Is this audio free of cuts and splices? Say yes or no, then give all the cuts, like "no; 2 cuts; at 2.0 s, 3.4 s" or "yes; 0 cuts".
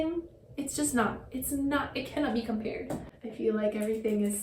no; 1 cut; at 3.1 s